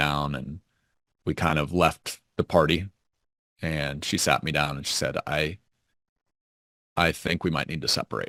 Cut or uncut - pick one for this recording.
uncut